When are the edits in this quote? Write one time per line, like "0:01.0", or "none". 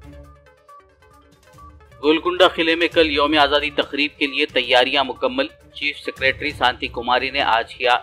0:01.0
0:01.6